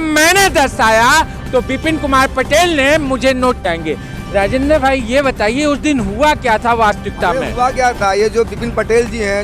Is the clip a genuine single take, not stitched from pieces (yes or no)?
no